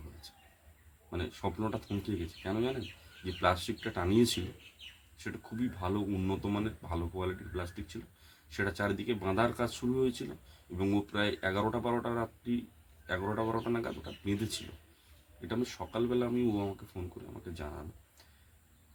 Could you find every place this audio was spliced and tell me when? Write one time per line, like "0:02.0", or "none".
none

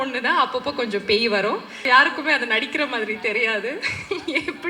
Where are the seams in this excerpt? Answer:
0:01.8

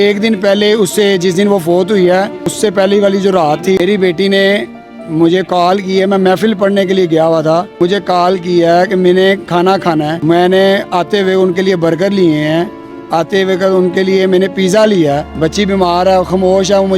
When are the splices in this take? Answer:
0:02.4
0:03.8
0:07.7
0:10.2
0:15.3

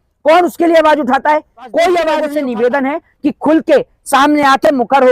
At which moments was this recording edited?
0:02.3

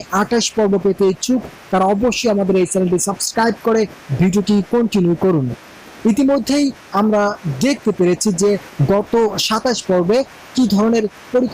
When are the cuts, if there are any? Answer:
0:08.7

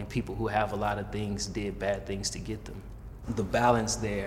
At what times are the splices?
0:03.1

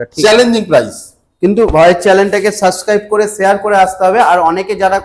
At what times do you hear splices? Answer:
none

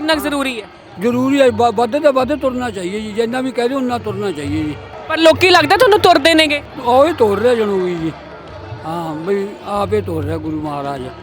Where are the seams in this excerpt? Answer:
0:04.9
0:06.6

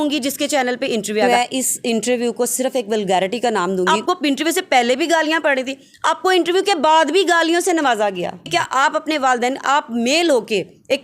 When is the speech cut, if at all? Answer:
0:01.2
0:03.9
0:08.3

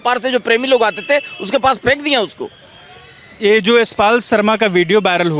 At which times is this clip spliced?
none

